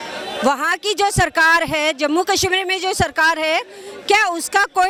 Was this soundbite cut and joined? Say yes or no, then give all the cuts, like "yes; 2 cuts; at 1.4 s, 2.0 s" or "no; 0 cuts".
no; 0 cuts